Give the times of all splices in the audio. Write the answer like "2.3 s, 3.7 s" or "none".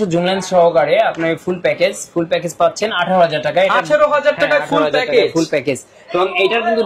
none